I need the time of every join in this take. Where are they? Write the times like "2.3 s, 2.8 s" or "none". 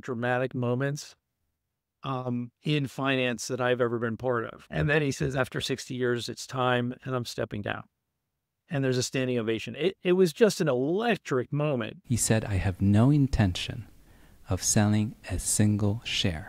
4.6 s, 11.9 s